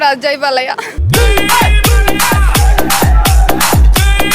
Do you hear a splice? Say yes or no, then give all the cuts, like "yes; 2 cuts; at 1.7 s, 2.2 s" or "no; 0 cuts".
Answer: yes; 1 cut; at 0.9 s